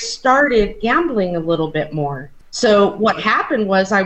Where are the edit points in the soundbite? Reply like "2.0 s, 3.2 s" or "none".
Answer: 2.4 s